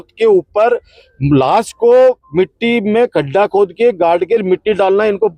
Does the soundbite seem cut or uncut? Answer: uncut